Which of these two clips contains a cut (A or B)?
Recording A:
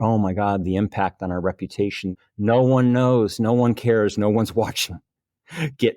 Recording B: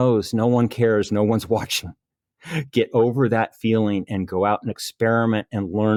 A